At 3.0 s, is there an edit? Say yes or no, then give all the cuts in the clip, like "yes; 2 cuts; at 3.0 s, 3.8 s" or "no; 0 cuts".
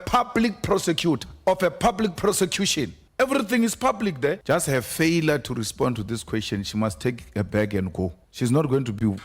yes; 4 cuts; at 1.3 s, 3.0 s, 4.4 s, 8.2 s